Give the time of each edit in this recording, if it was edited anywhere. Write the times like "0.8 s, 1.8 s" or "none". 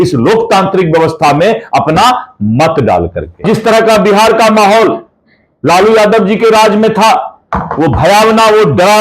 3.4 s